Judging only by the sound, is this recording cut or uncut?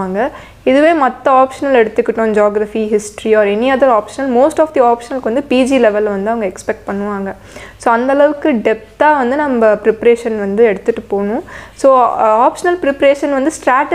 uncut